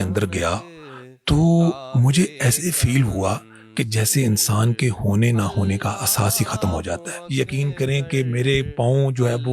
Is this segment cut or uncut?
cut